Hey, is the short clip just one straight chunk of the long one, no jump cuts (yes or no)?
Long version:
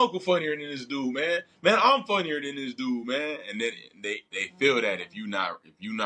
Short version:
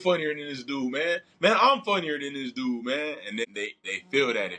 no